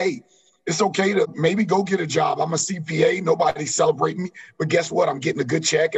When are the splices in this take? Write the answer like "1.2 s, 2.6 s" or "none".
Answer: 1.3 s